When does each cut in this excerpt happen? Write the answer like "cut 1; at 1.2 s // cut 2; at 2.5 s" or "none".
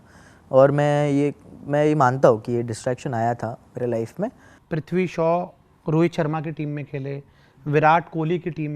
cut 1; at 4.5 s

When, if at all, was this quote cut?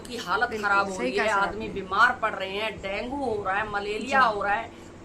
none

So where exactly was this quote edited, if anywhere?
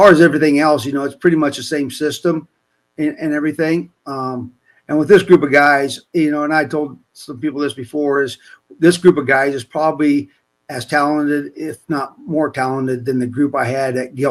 none

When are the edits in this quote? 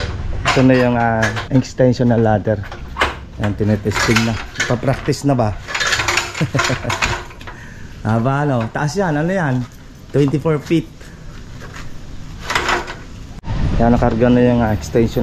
cut 1; at 1.4 s // cut 2; at 13.2 s

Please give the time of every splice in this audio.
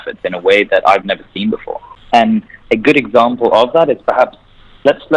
cut 1; at 1.9 s

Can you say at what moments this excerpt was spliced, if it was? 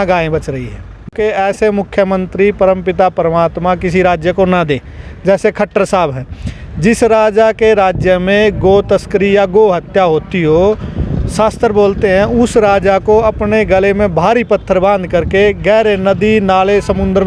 cut 1; at 1.0 s

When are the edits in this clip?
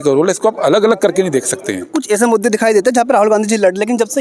cut 1; at 1.9 s

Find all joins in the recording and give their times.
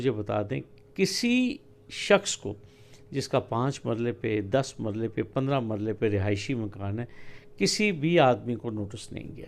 none

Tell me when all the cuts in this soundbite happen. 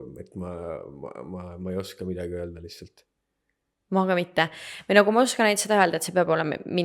none

